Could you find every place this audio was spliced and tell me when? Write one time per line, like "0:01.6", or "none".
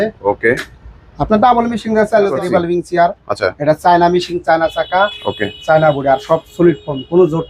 0:02.3